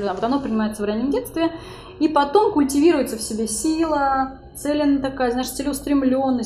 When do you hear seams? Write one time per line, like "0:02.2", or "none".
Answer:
none